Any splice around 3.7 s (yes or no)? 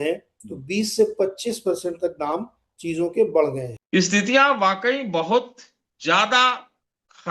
yes